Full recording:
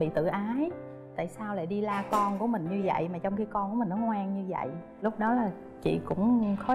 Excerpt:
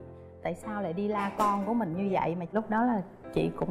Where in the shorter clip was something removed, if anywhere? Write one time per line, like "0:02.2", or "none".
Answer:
0:02.4